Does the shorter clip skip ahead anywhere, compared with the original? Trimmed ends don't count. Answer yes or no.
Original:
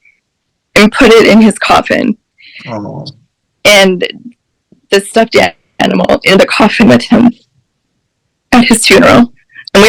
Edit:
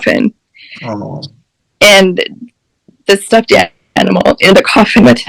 no